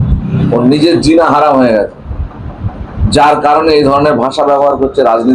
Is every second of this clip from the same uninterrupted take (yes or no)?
yes